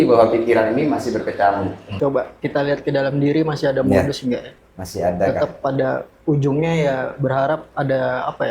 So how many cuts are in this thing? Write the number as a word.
one